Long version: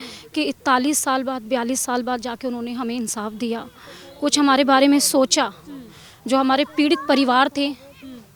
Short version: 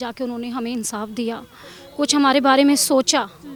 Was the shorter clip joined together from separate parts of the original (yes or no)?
no